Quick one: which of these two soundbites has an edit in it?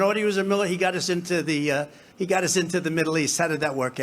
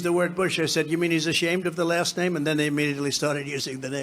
first; 1 cut; at 2.0 s

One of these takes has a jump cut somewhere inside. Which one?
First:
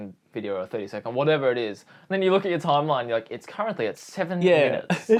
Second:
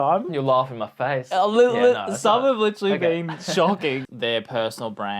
second; 1 cut; at 4.0 s

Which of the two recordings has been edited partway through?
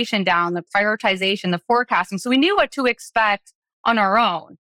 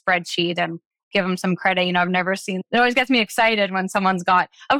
second; 1 cut; at 2.6 s

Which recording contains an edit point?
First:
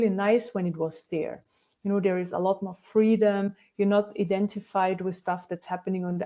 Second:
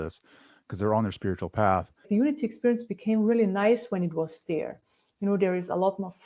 second; 1 cut; at 2.1 s

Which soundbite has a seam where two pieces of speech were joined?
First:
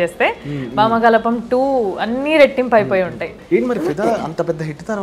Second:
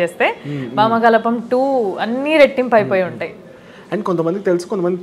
first; 1 cut; at 3.3 s

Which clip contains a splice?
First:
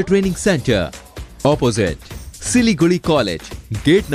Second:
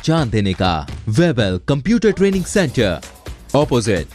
second; 1 cut; at 0.9 s

